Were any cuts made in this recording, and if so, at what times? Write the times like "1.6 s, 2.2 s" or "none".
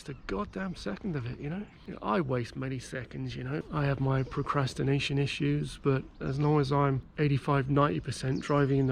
1.8 s, 3.7 s, 7.1 s